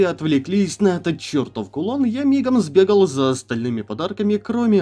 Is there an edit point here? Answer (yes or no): no